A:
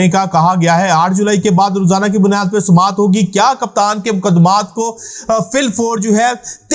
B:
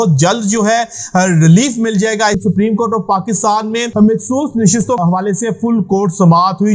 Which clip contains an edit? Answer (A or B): B